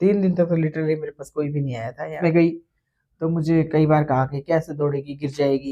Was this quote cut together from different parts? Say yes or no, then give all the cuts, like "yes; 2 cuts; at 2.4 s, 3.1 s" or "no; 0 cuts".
yes; 1 cut; at 2.2 s